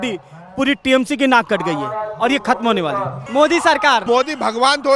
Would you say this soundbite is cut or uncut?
cut